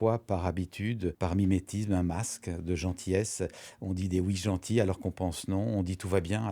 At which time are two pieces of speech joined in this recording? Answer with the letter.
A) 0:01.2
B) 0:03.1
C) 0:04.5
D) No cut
A